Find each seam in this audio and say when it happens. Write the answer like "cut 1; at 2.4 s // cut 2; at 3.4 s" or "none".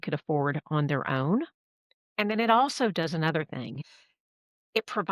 cut 1; at 3.8 s